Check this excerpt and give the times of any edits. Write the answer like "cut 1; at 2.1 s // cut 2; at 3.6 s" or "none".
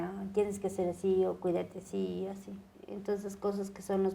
cut 1; at 2.7 s